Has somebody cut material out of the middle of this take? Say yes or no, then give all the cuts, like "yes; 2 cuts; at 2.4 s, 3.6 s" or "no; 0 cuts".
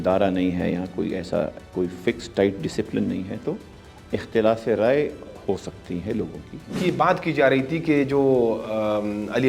yes; 2 cuts; at 1.6 s, 6.8 s